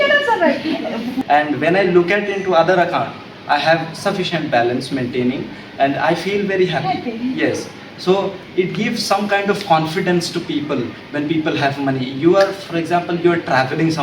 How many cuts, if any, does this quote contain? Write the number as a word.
one